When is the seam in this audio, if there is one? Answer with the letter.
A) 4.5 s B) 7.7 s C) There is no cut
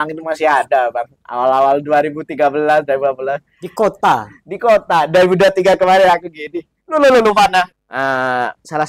B